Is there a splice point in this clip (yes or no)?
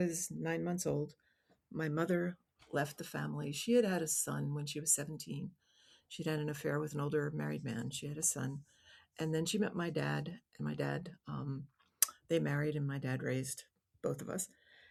no